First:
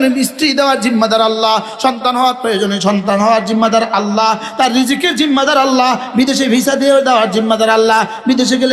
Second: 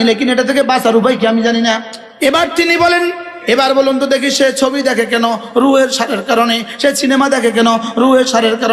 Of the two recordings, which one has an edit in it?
second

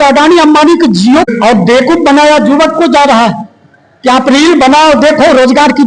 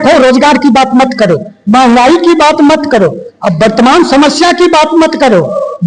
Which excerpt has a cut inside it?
first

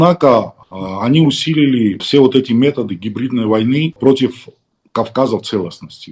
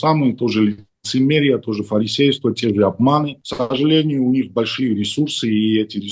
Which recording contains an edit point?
first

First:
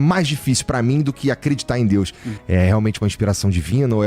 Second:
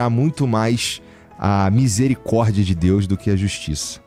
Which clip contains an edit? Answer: first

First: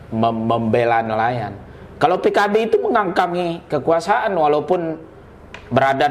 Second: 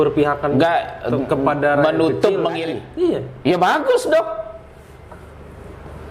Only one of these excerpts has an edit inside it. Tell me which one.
second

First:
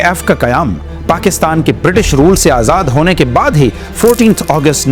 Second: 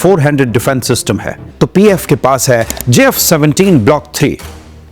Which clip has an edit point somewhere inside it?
second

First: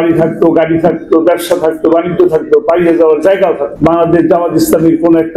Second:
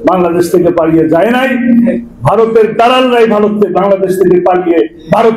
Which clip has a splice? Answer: first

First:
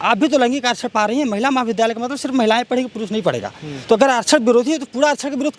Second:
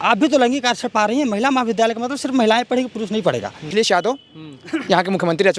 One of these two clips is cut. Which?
second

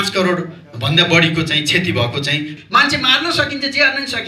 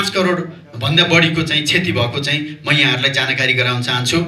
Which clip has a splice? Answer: first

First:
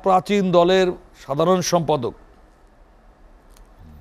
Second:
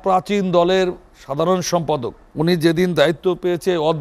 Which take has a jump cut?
second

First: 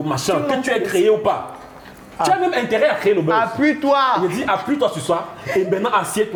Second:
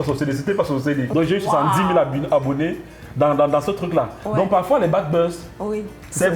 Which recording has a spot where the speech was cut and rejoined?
second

